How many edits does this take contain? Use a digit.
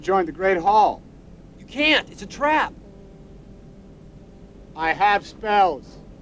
0